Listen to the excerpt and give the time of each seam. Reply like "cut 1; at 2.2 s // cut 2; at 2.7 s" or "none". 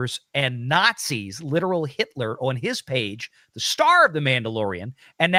none